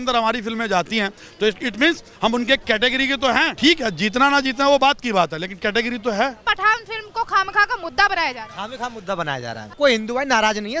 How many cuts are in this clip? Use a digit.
3